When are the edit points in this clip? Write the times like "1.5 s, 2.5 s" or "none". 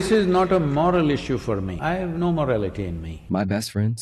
1.7 s, 3.1 s